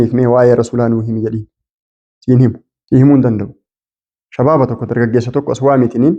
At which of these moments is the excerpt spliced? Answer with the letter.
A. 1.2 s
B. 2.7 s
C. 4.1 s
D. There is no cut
B